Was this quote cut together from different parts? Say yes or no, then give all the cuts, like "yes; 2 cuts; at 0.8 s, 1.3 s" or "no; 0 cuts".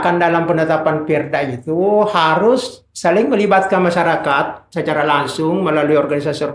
no; 0 cuts